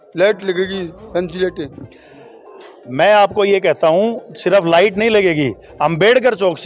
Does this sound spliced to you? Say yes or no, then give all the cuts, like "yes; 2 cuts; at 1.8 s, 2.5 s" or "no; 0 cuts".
no; 0 cuts